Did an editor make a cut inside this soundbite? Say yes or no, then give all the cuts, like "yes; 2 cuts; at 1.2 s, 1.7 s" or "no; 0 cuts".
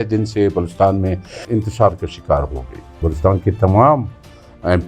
yes; 2 cuts; at 1.4 s, 3.1 s